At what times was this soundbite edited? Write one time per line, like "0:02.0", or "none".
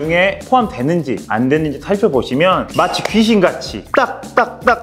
none